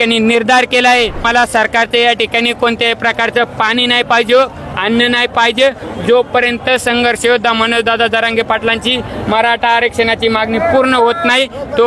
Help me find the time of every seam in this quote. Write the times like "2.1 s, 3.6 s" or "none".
1.3 s